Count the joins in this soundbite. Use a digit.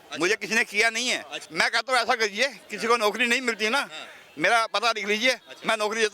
1